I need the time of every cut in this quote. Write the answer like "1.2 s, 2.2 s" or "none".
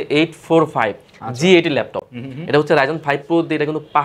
none